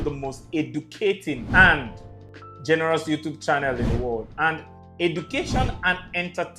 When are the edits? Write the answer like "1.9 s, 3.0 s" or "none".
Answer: 1.4 s